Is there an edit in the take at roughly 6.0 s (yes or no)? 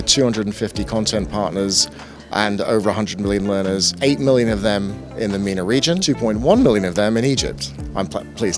yes